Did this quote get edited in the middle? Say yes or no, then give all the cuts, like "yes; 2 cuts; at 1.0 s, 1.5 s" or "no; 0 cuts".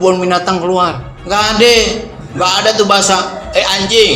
yes; 2 cuts; at 1.1 s, 2.2 s